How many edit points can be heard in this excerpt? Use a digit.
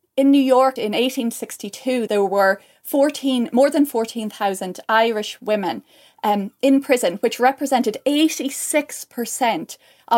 2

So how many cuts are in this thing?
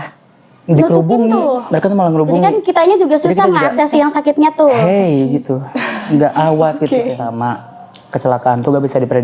1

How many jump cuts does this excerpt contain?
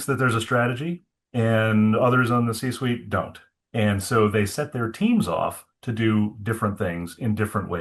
0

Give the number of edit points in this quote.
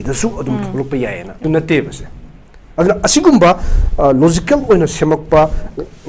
1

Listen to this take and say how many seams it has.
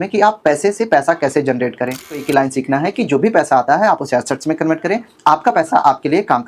1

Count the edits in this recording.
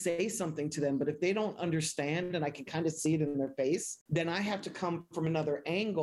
1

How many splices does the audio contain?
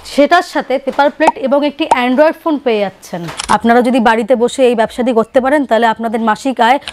1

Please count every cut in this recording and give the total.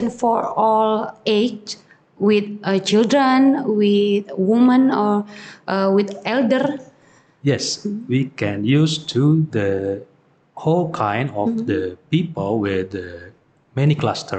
0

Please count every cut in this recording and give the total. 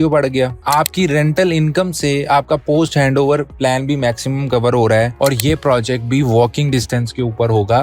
1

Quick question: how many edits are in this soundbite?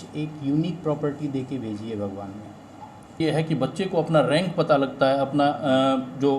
1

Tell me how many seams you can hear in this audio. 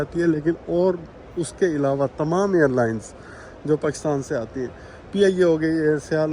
0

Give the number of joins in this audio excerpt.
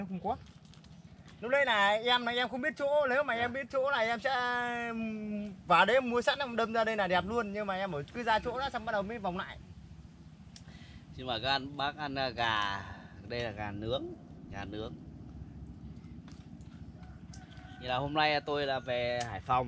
0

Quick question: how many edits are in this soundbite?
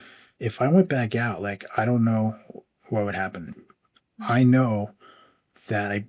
1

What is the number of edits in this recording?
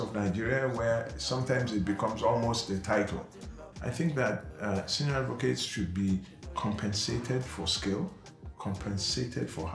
0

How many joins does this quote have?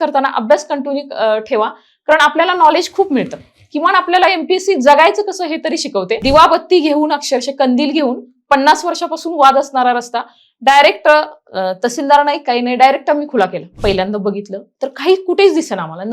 2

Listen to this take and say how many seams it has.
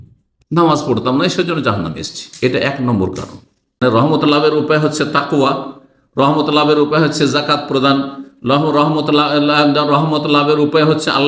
1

